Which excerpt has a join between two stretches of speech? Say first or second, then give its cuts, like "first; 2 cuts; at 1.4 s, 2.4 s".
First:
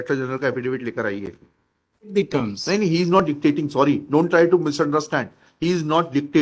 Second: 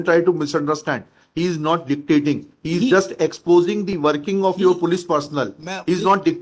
first; 1 cut; at 2.1 s